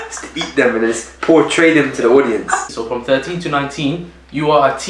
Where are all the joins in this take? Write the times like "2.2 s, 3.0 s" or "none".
2.7 s